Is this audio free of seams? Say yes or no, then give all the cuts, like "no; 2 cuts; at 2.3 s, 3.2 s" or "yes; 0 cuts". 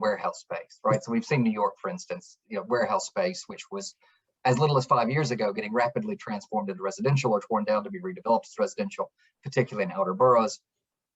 yes; 0 cuts